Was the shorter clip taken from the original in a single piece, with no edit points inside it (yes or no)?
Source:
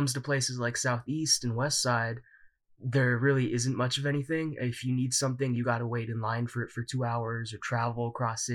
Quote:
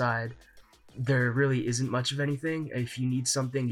yes